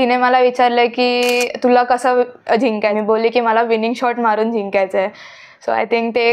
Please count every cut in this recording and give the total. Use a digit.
1